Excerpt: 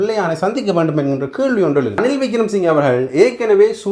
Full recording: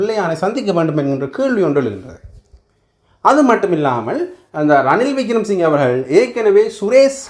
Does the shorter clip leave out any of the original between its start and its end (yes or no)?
yes